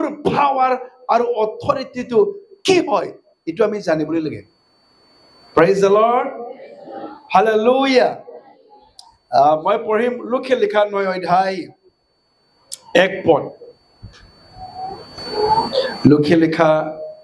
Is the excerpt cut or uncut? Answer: uncut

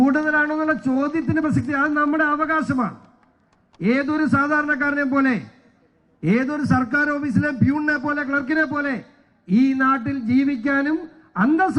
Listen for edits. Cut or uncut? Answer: uncut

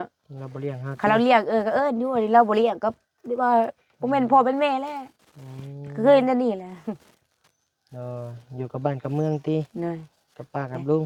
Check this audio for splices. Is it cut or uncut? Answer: uncut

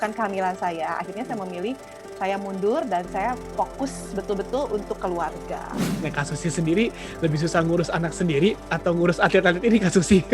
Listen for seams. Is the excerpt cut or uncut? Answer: cut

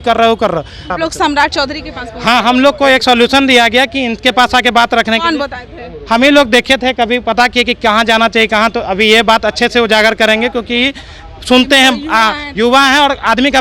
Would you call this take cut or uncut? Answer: cut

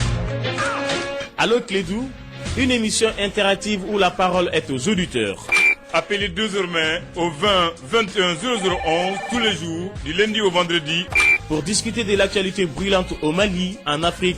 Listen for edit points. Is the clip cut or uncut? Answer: uncut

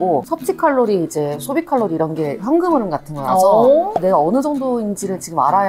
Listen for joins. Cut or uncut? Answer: cut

